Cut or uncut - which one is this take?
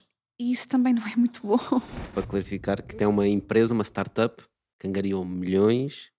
cut